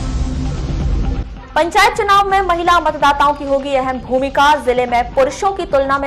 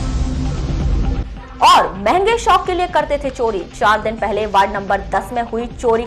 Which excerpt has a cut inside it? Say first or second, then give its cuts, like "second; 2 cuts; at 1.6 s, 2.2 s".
second; 1 cut; at 1.1 s